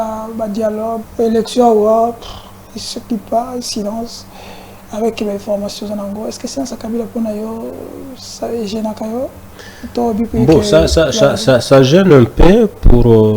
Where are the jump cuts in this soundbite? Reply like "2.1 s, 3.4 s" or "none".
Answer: 1.1 s